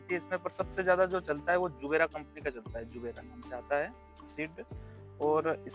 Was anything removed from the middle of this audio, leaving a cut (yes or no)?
no